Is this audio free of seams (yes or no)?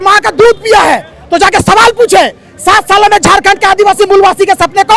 yes